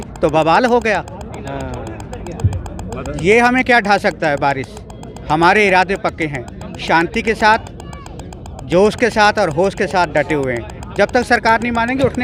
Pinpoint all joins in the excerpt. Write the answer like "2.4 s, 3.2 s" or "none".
none